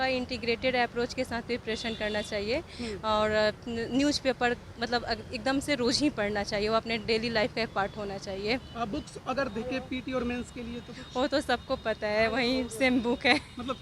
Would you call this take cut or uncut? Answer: uncut